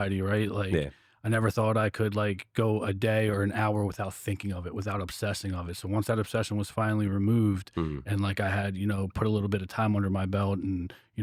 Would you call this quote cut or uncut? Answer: uncut